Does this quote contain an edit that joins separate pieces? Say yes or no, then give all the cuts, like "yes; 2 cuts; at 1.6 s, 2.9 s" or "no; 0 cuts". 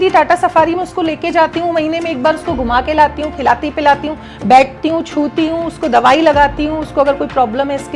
no; 0 cuts